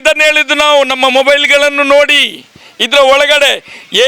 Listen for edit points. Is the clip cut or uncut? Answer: uncut